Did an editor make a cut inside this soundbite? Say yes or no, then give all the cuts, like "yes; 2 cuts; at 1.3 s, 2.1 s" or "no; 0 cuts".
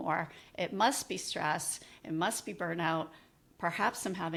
no; 0 cuts